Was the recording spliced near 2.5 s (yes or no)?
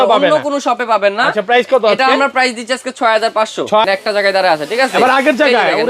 no